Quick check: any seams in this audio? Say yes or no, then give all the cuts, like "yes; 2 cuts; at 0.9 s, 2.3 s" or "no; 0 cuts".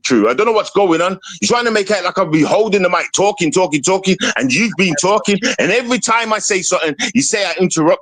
no; 0 cuts